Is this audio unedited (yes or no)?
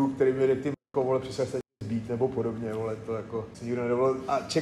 yes